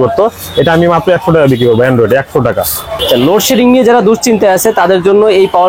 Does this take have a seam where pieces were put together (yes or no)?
yes